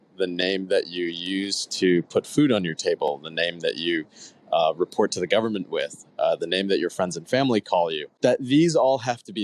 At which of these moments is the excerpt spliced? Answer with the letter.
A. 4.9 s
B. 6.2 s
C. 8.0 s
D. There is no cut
C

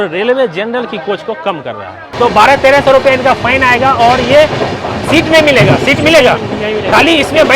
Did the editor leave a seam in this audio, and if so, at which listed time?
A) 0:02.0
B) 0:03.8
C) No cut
A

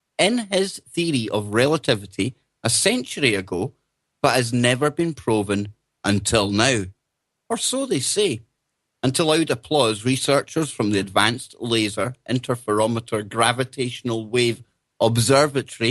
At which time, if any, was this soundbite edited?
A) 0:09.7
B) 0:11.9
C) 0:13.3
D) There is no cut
B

